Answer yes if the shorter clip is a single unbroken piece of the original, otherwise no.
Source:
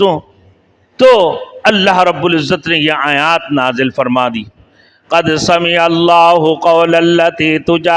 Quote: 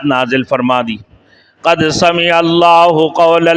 yes